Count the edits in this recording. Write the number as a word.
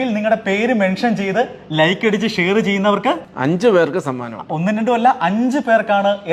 one